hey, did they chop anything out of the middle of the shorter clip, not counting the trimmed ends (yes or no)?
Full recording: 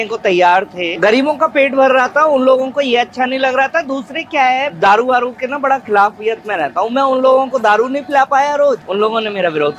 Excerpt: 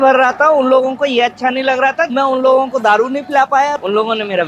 yes